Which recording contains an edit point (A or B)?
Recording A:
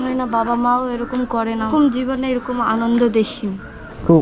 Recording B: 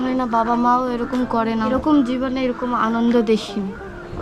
A